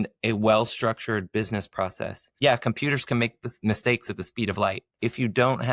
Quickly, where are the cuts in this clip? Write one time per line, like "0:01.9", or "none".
0:02.3
0:04.9